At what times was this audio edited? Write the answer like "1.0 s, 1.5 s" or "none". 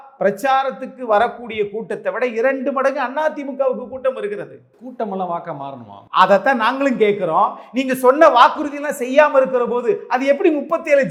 none